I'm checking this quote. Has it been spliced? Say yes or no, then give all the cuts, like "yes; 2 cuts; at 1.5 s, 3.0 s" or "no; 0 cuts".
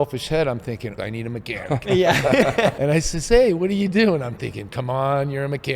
yes; 2 cuts; at 0.9 s, 2.8 s